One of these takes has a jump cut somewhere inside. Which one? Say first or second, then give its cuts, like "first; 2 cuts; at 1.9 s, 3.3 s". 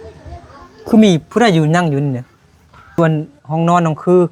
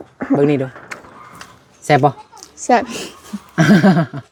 first; 1 cut; at 3.0 s